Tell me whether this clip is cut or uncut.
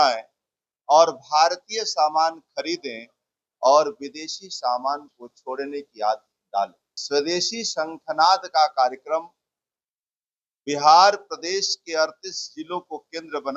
cut